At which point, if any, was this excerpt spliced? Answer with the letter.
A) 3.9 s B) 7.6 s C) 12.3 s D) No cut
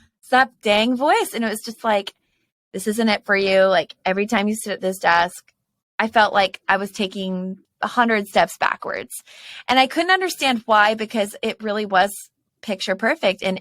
B